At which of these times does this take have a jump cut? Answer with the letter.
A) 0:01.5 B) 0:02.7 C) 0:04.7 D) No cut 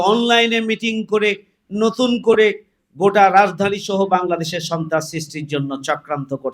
D